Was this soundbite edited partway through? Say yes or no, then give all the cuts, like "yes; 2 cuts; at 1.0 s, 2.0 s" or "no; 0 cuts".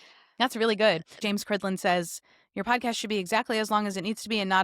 yes; 1 cut; at 1.2 s